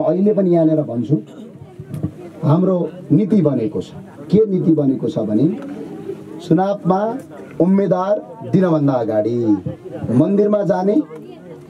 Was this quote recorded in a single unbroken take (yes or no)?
yes